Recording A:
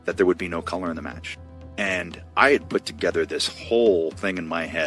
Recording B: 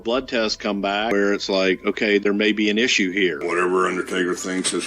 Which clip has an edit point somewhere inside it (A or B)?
B